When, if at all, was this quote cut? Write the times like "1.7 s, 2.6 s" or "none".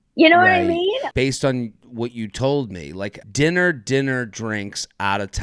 1.1 s, 3.2 s